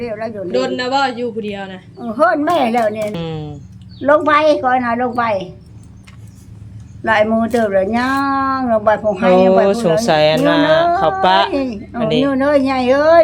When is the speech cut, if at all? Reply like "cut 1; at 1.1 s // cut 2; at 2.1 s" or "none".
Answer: cut 1; at 3.3 s